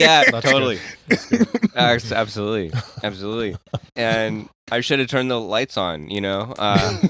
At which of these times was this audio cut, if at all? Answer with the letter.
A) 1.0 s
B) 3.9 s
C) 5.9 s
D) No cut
B